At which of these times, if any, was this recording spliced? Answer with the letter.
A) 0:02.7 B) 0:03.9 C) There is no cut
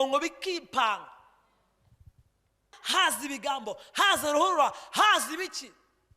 A